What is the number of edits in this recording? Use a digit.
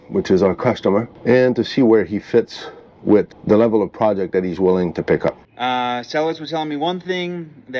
3